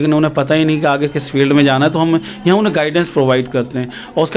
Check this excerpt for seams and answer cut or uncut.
uncut